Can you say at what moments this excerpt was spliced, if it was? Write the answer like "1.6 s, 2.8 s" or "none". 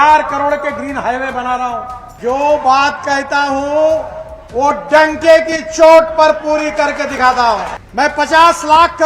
2.0 s, 7.8 s